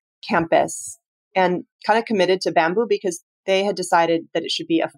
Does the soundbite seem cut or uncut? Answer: cut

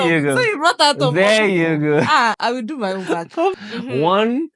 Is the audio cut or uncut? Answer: cut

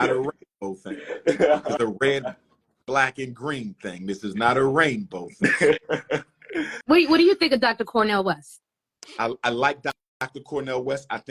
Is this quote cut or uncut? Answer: cut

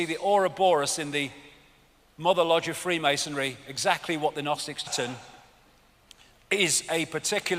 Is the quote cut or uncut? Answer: uncut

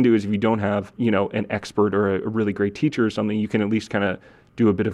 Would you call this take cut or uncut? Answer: cut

